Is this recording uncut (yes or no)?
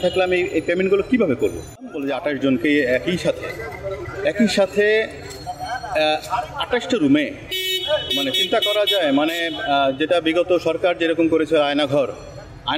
no